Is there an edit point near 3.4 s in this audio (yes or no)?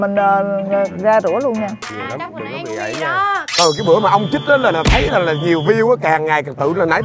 yes